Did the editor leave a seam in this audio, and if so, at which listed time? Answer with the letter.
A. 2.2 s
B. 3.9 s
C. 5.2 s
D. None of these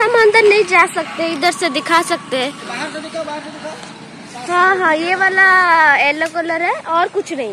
D